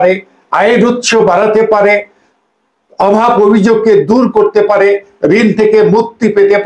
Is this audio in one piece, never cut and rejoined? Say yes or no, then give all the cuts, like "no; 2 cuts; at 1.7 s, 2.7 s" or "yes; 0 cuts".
yes; 0 cuts